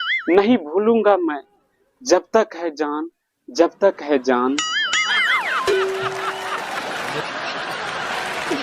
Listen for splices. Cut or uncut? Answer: uncut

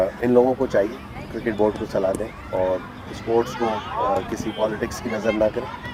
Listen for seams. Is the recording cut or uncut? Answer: uncut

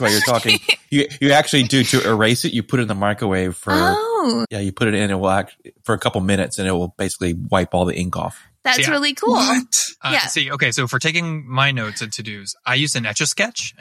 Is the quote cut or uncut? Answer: uncut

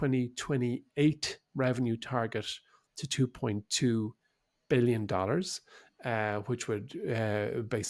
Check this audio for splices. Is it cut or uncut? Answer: uncut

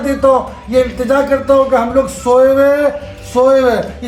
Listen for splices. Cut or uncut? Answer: uncut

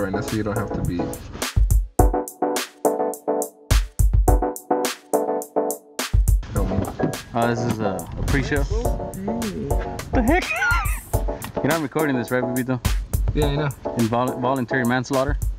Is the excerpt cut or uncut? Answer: uncut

